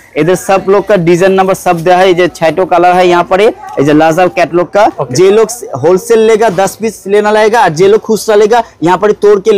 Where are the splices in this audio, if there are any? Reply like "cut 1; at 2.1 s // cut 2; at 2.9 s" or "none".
cut 1; at 5.0 s